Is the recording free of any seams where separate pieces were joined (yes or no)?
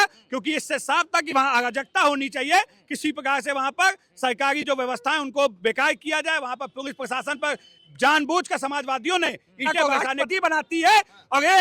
no